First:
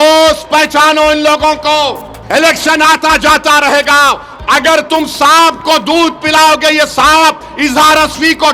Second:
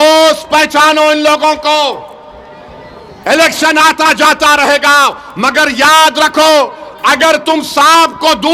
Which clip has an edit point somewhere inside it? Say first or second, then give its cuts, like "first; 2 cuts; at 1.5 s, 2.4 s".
first; 2 cuts; at 2.1 s, 4.3 s